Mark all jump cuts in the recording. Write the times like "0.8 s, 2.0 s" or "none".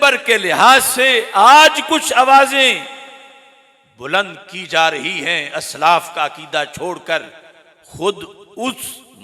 none